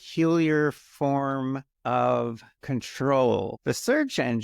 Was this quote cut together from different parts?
yes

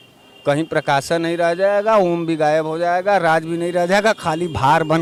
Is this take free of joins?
yes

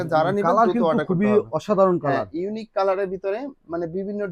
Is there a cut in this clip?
no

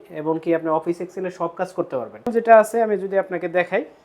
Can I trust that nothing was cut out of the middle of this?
no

